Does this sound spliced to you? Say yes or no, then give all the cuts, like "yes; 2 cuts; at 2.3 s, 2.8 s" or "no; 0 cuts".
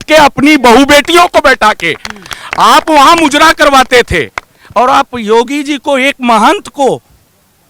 no; 0 cuts